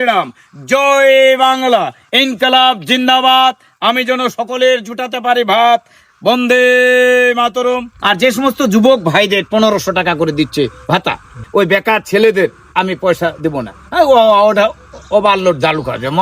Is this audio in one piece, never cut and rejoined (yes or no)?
no